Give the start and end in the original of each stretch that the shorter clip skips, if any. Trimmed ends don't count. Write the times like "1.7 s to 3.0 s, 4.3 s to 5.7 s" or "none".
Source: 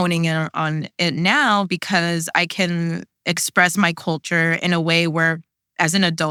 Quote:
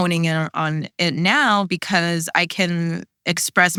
none